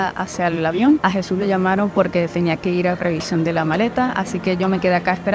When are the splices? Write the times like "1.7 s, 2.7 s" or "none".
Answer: 1.0 s